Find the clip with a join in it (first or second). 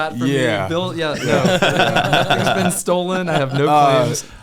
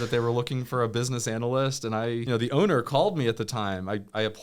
second